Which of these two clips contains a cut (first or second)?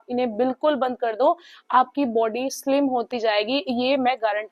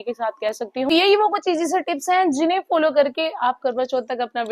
second